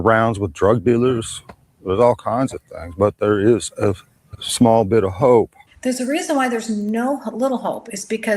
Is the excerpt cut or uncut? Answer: cut